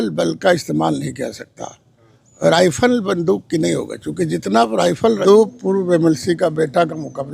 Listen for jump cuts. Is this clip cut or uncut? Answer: cut